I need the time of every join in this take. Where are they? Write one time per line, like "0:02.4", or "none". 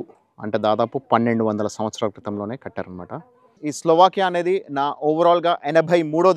0:03.5